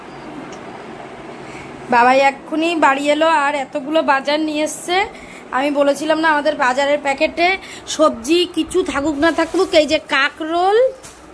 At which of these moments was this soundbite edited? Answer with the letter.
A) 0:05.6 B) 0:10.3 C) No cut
C